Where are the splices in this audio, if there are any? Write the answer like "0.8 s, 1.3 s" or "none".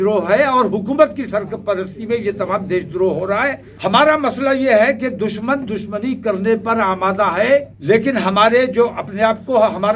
3.7 s, 7.7 s